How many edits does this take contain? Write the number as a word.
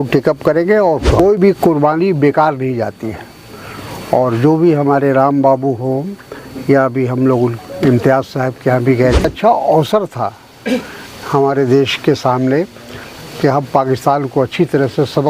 two